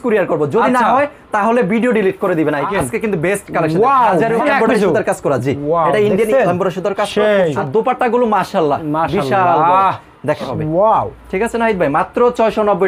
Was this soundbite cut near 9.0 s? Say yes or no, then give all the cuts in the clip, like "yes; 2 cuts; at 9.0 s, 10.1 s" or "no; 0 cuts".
no; 4 cuts; at 2.7 s, 4.4 s, 7.6 s, 10.5 s